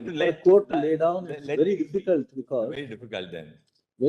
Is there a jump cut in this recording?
no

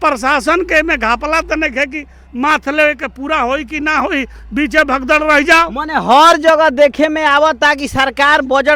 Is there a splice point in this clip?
no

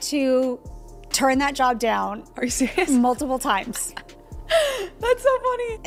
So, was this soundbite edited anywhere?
no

